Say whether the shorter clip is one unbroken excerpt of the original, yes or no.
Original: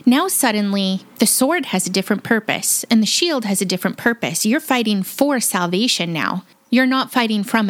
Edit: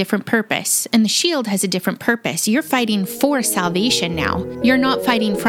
no